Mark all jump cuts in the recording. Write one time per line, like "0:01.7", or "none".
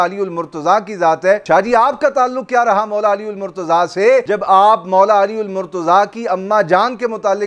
0:01.4
0:04.3